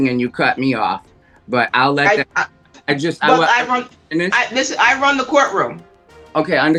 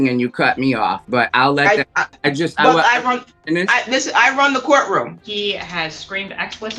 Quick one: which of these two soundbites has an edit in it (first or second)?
second